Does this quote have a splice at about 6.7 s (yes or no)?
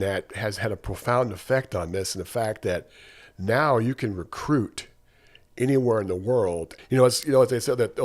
yes